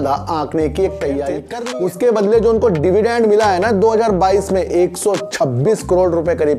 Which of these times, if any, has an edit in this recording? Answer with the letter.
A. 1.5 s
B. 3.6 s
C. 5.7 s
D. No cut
A